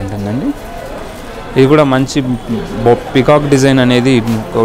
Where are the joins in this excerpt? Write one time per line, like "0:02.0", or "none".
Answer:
none